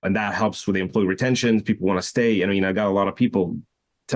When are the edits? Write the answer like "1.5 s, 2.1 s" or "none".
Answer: none